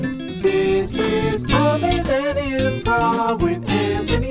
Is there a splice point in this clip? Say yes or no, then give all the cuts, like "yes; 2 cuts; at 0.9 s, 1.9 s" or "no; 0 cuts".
no; 0 cuts